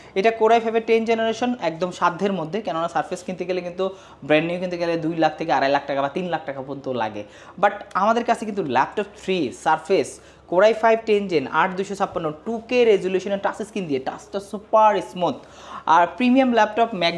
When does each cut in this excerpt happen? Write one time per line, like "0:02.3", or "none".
none